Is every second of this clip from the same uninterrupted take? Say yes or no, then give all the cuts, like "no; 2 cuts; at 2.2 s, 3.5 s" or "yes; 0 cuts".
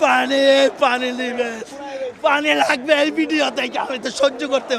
yes; 0 cuts